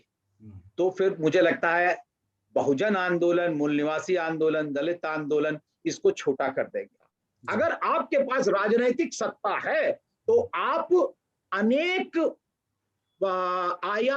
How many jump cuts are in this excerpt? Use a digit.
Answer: 1